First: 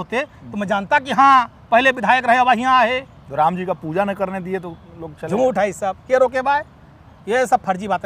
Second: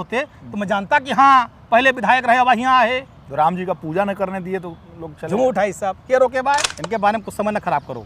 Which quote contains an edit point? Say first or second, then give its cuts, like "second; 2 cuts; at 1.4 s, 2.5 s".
second; 1 cut; at 6.8 s